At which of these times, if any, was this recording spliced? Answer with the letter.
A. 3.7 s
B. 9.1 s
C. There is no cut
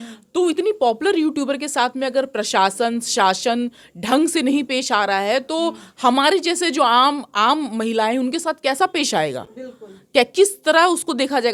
C